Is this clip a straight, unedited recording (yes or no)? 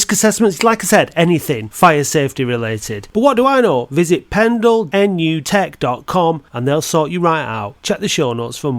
no